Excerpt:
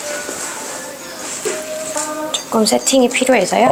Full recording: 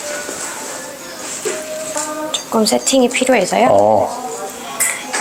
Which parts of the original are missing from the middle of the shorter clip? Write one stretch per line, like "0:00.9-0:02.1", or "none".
none